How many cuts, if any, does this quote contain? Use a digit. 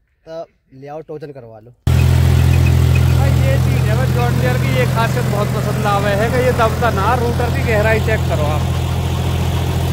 1